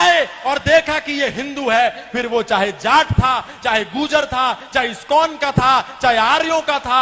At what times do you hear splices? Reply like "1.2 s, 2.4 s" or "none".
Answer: none